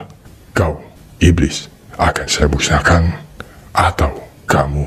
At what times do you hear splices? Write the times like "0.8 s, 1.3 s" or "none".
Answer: none